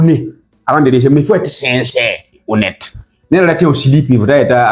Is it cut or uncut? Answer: uncut